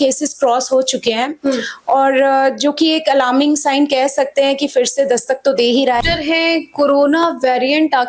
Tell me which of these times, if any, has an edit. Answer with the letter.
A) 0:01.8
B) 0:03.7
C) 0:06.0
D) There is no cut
C